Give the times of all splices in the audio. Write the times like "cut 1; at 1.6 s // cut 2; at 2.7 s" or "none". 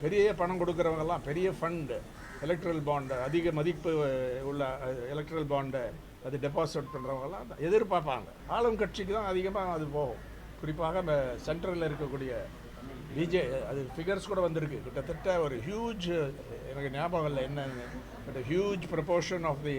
cut 1; at 8.4 s